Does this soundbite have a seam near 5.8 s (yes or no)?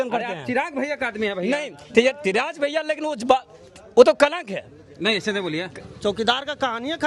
yes